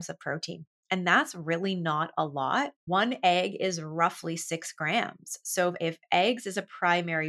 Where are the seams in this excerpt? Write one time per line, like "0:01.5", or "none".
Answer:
0:02.8
0:05.8